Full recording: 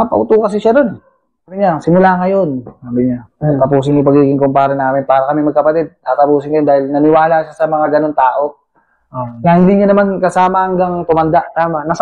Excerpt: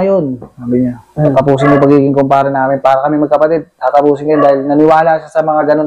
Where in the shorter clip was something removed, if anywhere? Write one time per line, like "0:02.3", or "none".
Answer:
none